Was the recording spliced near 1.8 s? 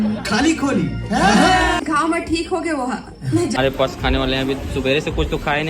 yes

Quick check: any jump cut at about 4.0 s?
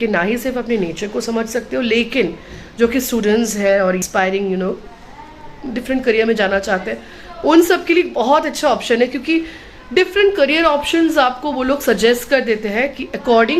yes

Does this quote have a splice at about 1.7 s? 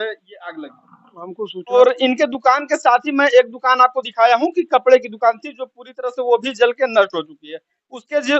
yes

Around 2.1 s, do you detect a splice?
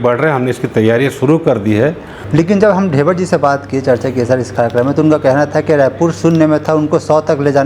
yes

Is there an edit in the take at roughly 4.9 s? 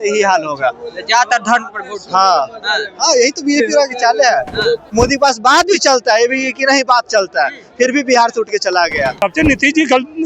yes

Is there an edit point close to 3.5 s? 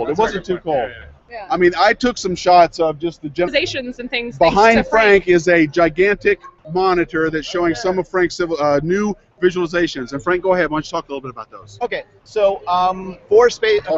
no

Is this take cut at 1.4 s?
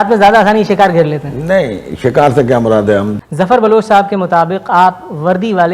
no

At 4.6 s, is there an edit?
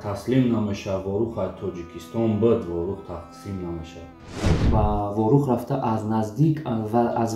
yes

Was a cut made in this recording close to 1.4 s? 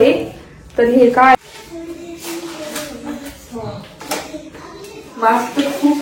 yes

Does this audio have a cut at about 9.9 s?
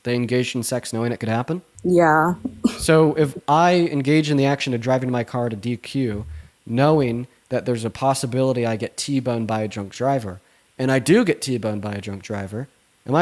no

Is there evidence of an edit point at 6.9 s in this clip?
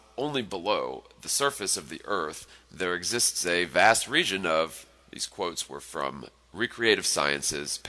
yes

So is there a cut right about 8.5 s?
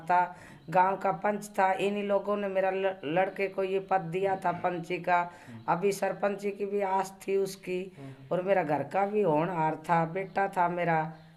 no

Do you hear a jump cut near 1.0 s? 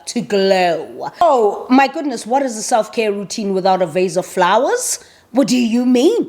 yes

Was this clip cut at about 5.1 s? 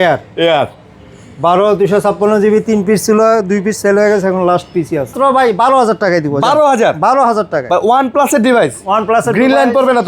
yes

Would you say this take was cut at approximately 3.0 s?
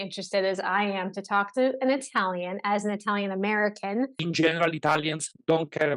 no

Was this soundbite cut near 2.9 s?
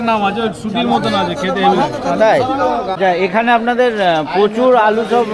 yes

